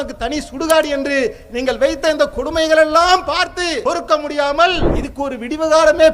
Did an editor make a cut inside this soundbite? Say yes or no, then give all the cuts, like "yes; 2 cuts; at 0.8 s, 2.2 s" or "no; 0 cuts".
yes; 2 cuts; at 3.8 s, 5.0 s